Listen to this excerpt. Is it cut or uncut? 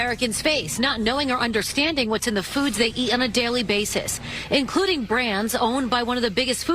cut